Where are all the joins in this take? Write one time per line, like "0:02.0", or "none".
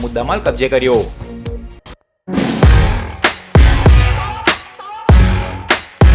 0:01.8